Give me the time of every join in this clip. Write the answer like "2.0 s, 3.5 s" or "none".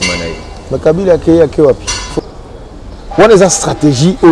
2.1 s